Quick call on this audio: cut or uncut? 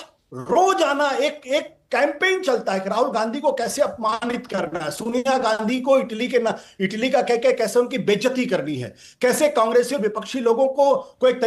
uncut